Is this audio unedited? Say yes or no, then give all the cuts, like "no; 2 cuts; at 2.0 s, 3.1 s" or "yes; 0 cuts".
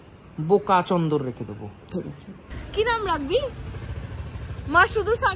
no; 1 cut; at 2.6 s